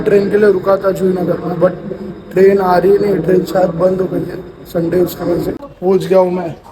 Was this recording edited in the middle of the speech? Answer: yes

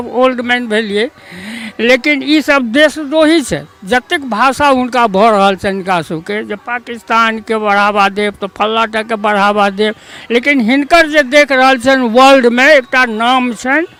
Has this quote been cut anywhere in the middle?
no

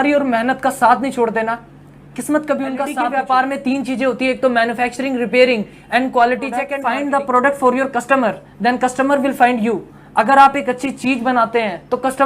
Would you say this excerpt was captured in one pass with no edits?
no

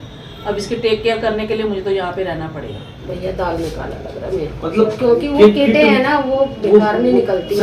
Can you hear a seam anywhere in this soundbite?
yes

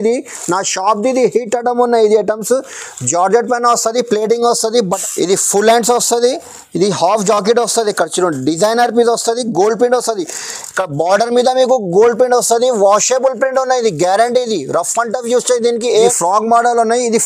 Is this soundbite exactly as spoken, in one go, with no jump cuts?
no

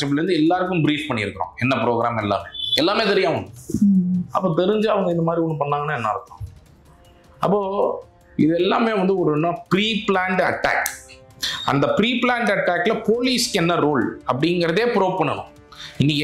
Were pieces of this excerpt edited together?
no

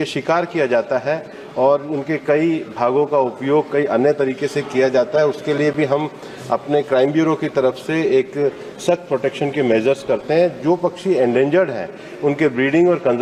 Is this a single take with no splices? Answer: yes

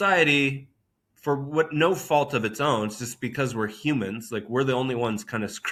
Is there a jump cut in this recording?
no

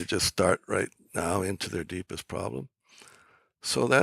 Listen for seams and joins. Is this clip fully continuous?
yes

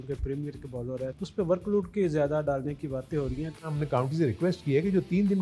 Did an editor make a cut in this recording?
yes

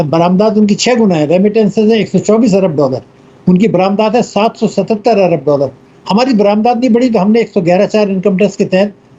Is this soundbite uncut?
yes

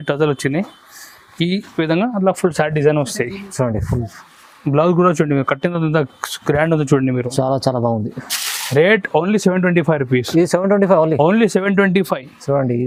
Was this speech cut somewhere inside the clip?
no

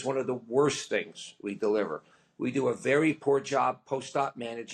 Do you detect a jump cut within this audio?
no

